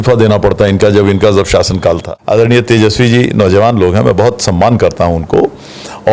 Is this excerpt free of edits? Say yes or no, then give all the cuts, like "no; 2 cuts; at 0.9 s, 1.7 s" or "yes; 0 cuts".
no; 1 cut; at 2.1 s